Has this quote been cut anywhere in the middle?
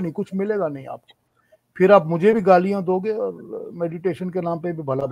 no; 0 cuts

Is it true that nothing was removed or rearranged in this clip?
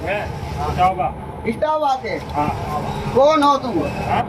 yes; 0 cuts

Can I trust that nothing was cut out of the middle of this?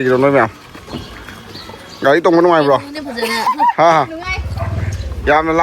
yes; 0 cuts

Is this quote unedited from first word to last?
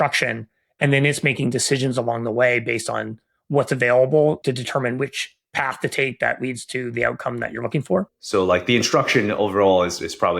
no; 2 cuts; at 4.4 s, 8.2 s

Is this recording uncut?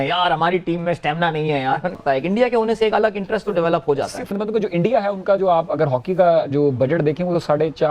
no; 1 cut; at 1.9 s

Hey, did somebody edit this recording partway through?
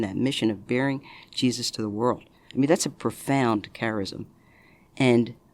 no; 0 cuts

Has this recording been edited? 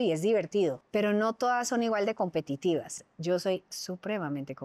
yes; 2 cuts; at 0.8 s, 3.0 s

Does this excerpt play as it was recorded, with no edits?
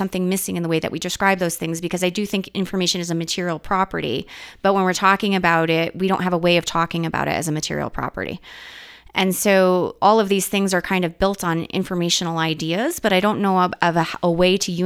yes; 0 cuts

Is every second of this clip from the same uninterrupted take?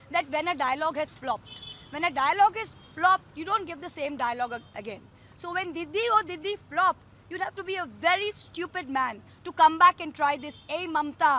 yes; 0 cuts

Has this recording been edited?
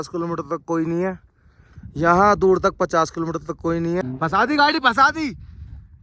yes; 1 cut; at 4.0 s

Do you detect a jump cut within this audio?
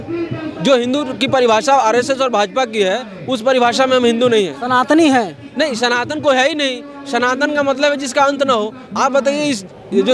no; 0 cuts

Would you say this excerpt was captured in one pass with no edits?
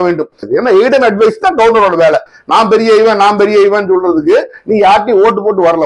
yes; 0 cuts

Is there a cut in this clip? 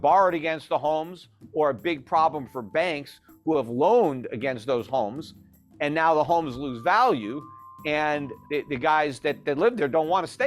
yes; 1 cut; at 8.3 s

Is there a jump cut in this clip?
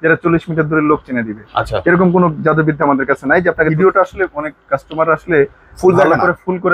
yes; 1 cut; at 3.7 s

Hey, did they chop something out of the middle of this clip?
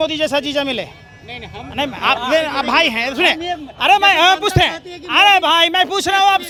no; 0 cuts

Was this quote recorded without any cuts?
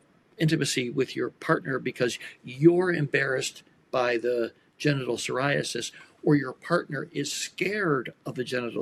yes; 0 cuts

